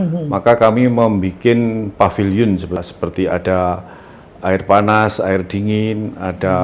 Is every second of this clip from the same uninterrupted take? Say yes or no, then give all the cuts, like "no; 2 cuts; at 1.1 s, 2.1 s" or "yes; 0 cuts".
no; 1 cut; at 2.8 s